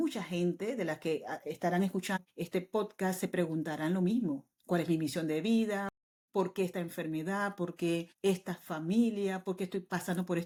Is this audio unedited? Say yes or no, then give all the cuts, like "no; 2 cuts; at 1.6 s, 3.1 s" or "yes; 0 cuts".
yes; 0 cuts